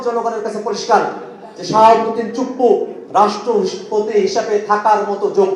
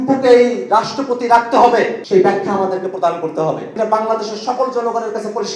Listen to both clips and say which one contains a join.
second; 2 cuts; at 2.0 s, 3.8 s

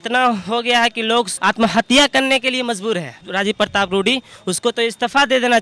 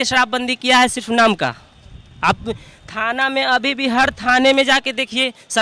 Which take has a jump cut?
first; 2 cuts; at 1.3 s, 3.2 s

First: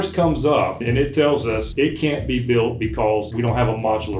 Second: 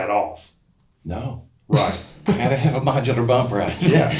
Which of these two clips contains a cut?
first; 3 cuts; at 0.8 s, 1.7 s, 3.3 s

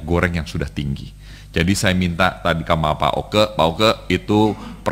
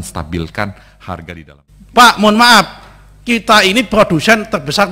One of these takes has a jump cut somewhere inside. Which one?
second; 1 cut; at 1.4 s

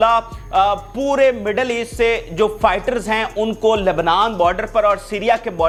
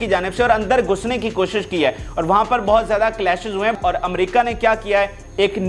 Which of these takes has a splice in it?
second; 1 cut; at 3.8 s

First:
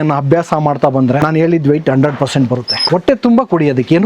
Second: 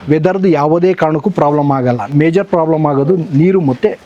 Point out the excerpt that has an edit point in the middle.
first; 2 cuts; at 1.2 s, 2.8 s

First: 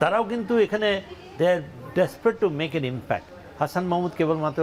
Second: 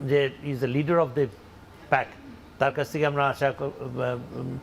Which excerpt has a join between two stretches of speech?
second; 1 cut; at 2.2 s

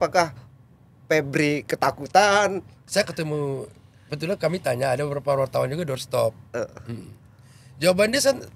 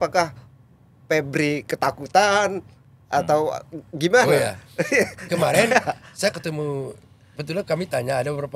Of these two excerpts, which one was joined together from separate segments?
first; 1 cut; at 2.8 s

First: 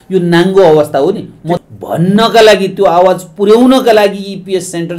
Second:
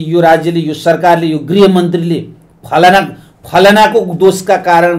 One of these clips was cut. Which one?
first; 1 cut; at 1.6 s

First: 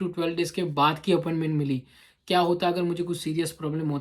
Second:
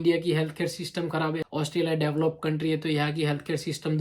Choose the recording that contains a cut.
second; 1 cut; at 1.4 s

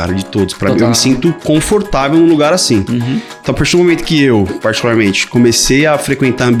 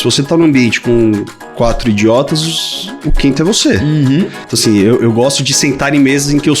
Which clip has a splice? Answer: second; 1 cut; at 4.4 s

